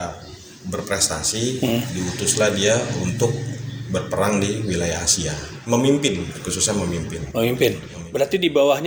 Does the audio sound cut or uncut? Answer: uncut